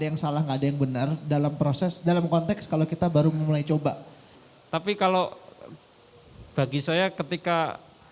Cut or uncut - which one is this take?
cut